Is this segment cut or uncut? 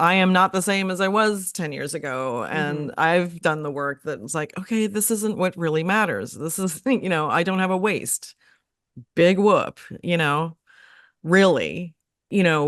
uncut